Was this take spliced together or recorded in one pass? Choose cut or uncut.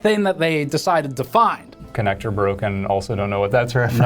cut